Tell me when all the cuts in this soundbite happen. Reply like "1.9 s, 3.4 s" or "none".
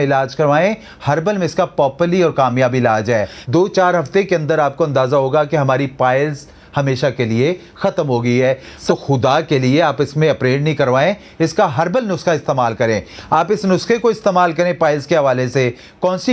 3.4 s, 8.7 s, 13.2 s